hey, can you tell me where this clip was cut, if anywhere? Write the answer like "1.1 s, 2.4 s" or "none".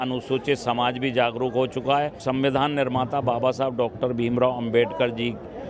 2.2 s